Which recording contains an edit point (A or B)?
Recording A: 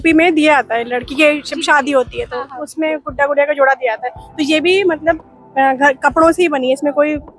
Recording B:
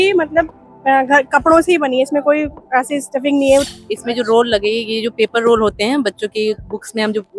B